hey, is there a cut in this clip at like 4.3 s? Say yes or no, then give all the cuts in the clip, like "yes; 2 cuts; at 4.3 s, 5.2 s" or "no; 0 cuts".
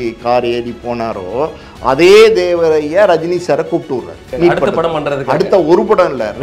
yes; 1 cut; at 4.3 s